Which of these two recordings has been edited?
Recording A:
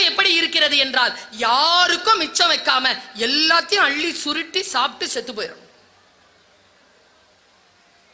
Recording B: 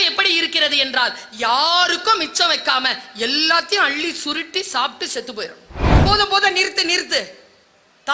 B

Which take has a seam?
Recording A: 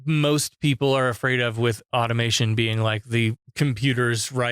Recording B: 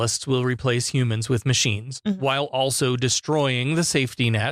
A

